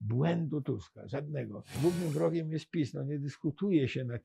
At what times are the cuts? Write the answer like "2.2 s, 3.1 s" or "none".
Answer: 1.6 s